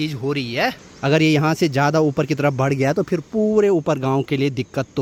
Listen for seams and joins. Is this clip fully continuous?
yes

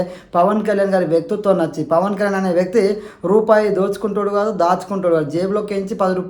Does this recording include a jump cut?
no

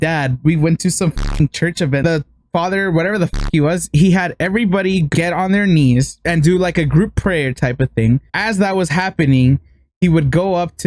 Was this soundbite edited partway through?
yes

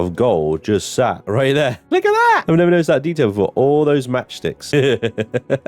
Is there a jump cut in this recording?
yes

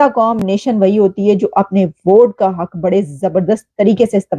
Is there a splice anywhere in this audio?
no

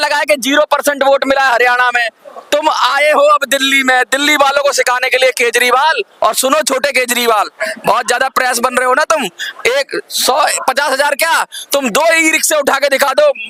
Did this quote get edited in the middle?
no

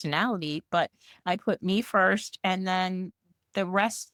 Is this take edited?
no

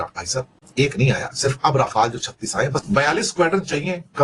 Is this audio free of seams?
no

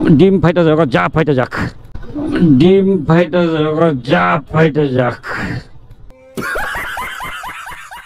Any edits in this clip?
no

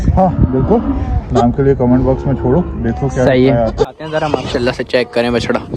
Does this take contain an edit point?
yes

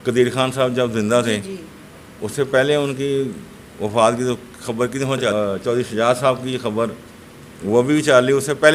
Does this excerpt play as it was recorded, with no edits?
no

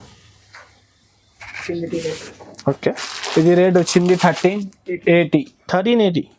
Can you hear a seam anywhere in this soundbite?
no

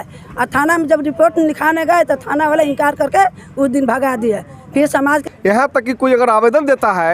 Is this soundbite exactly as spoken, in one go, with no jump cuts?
no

